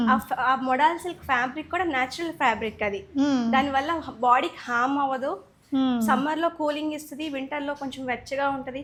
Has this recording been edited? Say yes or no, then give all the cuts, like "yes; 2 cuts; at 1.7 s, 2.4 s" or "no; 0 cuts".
no; 0 cuts